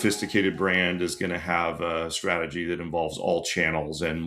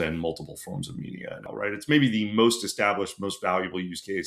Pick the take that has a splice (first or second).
second